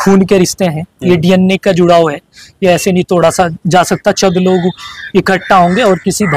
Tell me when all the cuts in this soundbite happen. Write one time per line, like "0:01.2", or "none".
none